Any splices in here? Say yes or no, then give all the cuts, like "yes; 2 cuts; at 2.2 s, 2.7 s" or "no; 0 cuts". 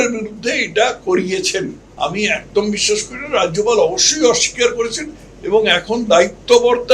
yes; 1 cut; at 1.8 s